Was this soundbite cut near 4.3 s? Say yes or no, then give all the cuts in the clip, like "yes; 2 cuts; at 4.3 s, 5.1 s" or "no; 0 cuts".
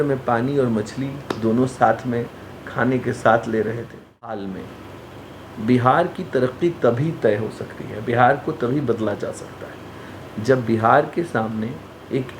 yes; 1 cut; at 4.3 s